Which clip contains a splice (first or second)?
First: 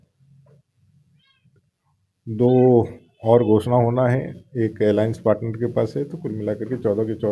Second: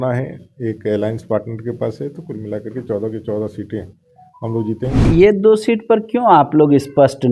second